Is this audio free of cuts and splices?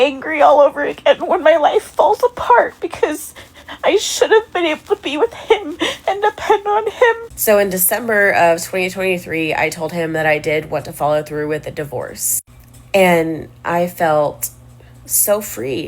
no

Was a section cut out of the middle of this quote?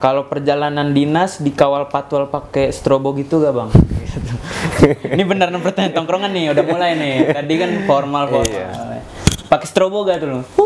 no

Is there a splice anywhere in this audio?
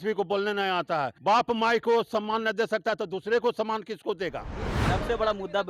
yes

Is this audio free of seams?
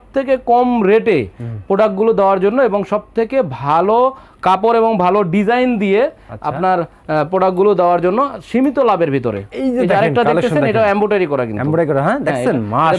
yes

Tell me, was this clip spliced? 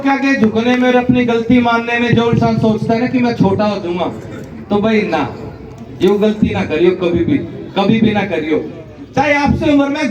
no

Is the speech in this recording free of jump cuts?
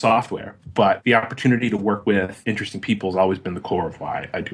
no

